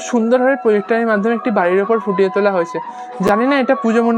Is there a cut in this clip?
no; 0 cuts

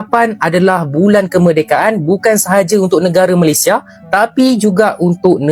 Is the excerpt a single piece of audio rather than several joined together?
yes; 0 cuts

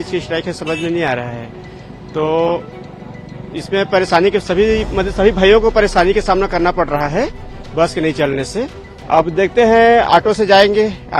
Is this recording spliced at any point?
no; 0 cuts

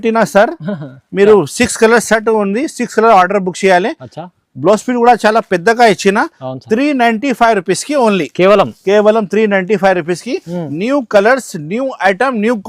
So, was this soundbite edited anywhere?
no; 0 cuts

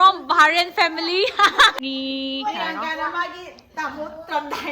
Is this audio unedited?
no; 1 cut; at 1.8 s

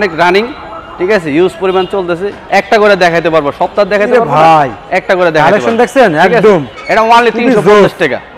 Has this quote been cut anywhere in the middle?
yes; 1 cut; at 2.3 s

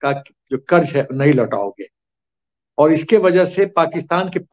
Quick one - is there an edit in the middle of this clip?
no; 0 cuts

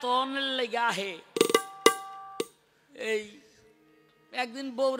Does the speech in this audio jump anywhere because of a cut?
no; 0 cuts

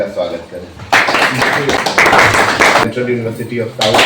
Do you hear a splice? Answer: yes; 2 cuts; at 1.8 s, 2.8 s

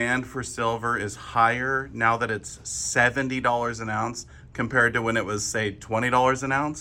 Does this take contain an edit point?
no; 0 cuts

